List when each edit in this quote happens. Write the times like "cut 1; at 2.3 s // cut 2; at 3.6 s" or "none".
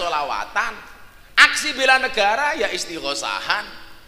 none